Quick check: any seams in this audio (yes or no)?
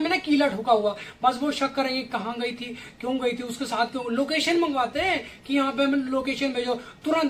no